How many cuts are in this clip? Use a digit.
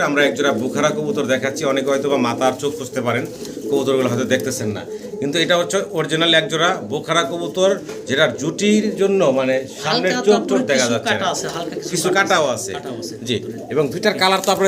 0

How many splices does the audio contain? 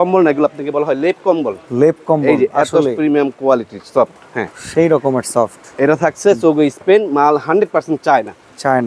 0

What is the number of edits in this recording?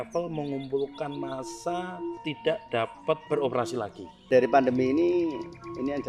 3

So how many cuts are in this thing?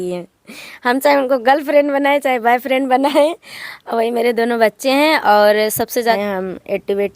1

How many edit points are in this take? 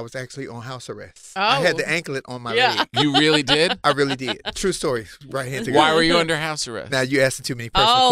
1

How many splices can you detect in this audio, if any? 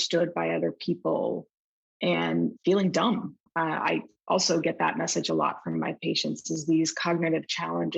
1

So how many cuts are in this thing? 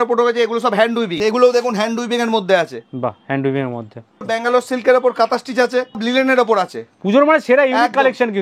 3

